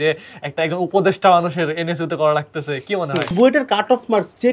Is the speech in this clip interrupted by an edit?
yes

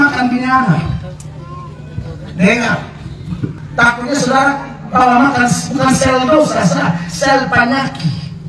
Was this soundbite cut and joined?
yes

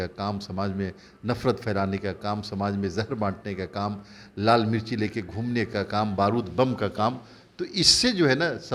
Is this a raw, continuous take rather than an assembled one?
yes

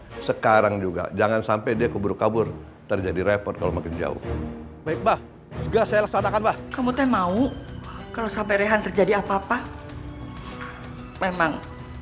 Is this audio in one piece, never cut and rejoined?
no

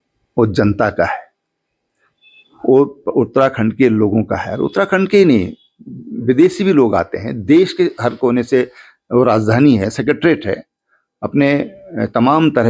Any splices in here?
no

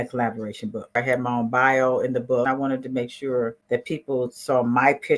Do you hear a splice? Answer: yes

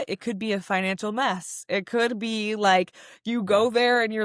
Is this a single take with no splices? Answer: yes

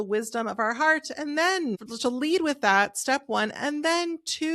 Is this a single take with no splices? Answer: no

